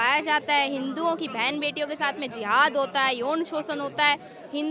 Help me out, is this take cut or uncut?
uncut